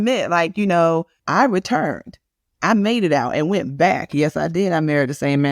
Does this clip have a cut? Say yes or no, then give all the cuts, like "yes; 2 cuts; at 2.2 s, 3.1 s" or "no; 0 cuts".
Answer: yes; 1 cut; at 1.2 s